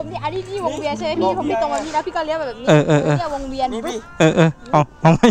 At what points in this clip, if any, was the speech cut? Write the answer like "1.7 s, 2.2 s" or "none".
1.6 s